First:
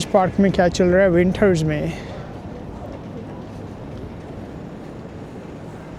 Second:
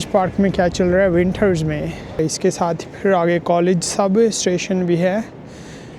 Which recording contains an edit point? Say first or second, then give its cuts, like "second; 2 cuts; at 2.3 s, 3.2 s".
second; 1 cut; at 2.2 s